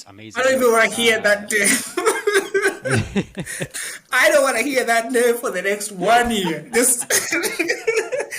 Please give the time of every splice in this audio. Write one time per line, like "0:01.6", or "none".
0:03.7